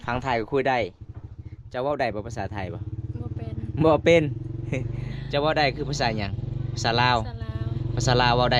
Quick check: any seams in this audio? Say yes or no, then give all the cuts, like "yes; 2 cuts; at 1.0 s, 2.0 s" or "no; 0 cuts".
no; 0 cuts